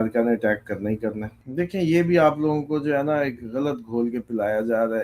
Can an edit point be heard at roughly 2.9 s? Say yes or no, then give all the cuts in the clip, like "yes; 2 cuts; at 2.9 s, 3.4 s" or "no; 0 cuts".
no; 1 cut; at 1.3 s